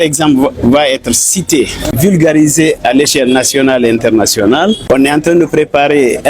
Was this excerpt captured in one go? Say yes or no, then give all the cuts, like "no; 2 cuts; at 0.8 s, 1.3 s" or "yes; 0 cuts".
no; 2 cuts; at 1.9 s, 4.8 s